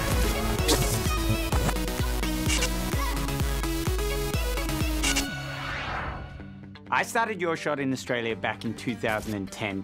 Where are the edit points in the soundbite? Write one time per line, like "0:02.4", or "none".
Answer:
0:05.4